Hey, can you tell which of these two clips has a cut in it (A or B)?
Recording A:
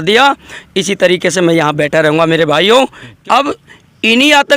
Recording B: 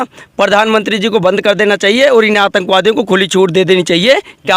A